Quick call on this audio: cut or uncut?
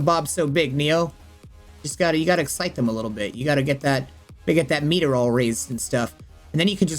uncut